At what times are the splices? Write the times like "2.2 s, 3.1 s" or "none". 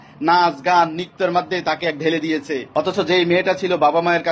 2.8 s

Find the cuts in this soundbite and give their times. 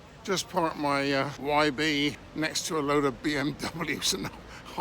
1.3 s, 2.2 s

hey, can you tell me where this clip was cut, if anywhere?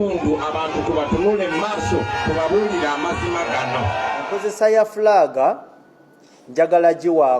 4.3 s

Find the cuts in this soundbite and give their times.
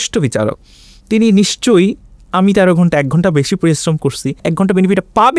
4.4 s

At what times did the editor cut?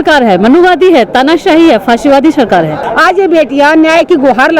2.8 s

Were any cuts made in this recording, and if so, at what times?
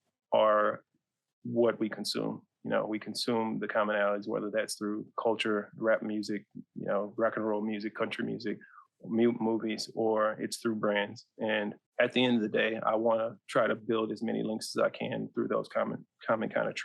11.8 s

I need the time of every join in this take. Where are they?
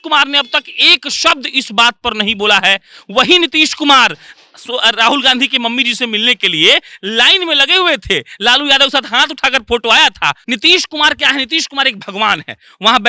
10.4 s

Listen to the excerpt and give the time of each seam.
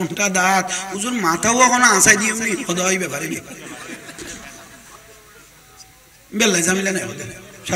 none

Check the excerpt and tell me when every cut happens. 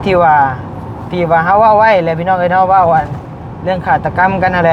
none

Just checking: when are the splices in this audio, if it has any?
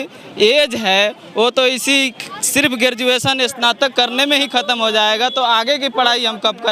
none

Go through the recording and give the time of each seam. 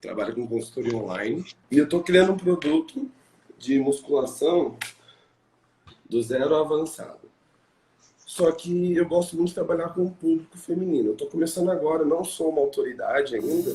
1.5 s

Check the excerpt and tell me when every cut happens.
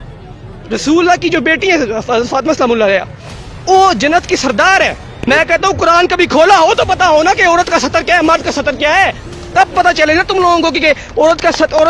5.1 s

